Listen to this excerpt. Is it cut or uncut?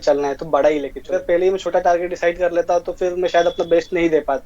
cut